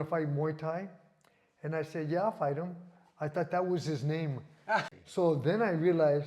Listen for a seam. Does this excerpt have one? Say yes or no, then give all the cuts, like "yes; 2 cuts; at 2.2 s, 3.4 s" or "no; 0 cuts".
yes; 1 cut; at 5.0 s